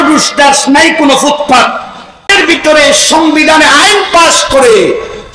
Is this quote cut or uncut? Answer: cut